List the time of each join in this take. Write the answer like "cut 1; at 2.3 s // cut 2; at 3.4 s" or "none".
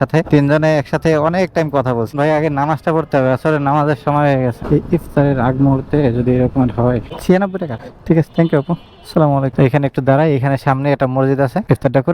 cut 1; at 2.1 s // cut 2; at 4.6 s // cut 3; at 7.1 s // cut 4; at 9.5 s